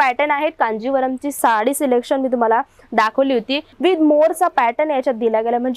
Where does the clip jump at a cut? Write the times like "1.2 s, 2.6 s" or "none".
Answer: 1.4 s, 3.7 s